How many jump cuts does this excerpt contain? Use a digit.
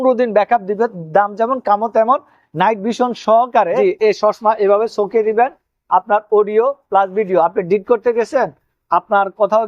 1